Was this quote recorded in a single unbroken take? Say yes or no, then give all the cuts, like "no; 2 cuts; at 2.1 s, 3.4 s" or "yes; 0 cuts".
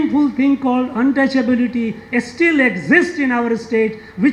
yes; 0 cuts